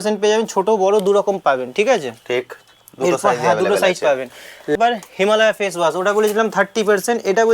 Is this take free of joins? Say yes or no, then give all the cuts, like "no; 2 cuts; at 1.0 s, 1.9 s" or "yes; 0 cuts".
no; 1 cut; at 4.8 s